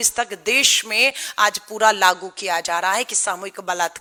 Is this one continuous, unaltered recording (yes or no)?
yes